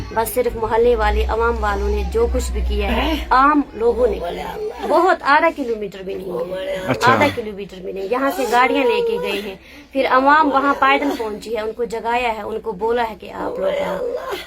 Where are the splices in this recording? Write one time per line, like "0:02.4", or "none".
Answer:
0:04.8